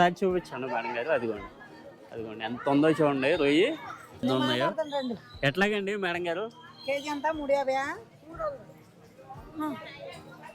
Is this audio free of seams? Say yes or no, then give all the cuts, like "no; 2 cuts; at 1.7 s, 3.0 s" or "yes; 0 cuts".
no; 1 cut; at 4.2 s